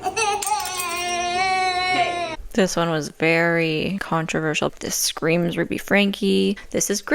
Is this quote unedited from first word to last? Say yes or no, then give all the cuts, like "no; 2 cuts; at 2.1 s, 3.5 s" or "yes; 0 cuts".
no; 2 cuts; at 2.4 s, 4.7 s